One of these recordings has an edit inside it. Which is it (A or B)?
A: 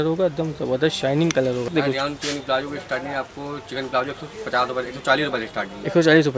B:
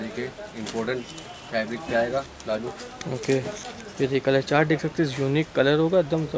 A